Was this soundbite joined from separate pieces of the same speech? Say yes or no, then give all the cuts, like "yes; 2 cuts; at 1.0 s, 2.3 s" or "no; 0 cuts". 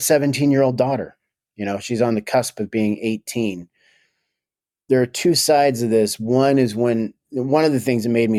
no; 0 cuts